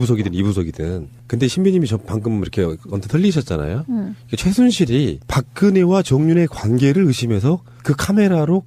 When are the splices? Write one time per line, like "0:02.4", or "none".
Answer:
0:07.6

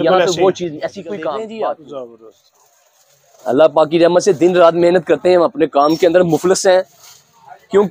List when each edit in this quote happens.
0:01.4

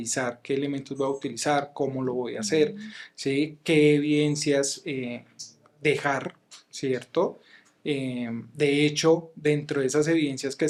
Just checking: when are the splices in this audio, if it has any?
none

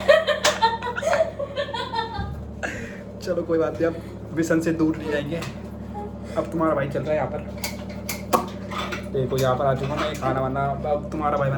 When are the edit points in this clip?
none

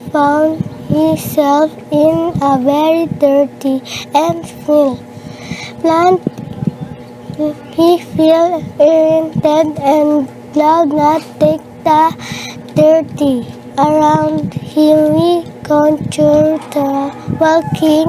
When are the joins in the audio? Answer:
0:06.5
0:15.0

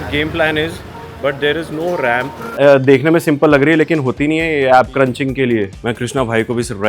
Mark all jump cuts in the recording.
0:02.5
0:05.8

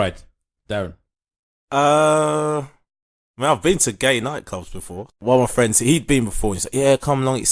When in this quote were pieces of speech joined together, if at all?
0:05.1

